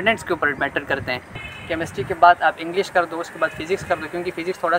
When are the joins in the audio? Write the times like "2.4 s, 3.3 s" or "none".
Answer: 1.5 s